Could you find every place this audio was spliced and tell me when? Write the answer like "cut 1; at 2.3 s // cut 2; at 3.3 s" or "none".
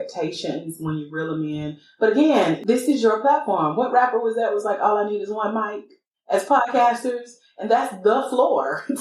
cut 1; at 2.6 s // cut 2; at 5.9 s